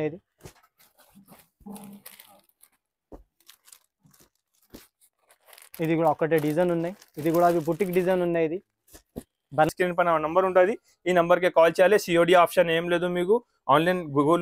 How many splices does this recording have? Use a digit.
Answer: 1